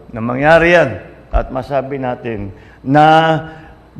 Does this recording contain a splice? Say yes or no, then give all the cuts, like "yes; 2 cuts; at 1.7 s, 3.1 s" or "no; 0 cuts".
no; 0 cuts